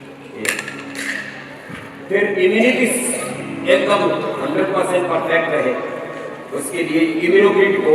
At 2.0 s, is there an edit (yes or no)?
no